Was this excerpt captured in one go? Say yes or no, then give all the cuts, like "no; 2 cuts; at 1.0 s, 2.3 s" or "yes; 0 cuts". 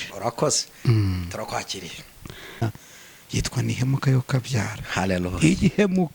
no; 1 cut; at 2.6 s